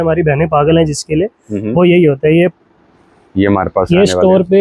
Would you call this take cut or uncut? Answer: cut